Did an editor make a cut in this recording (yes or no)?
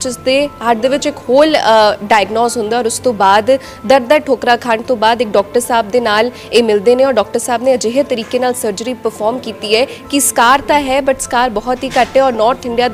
no